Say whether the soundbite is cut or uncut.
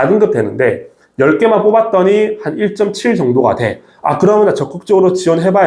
uncut